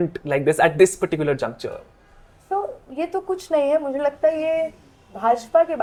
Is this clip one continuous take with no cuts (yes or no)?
yes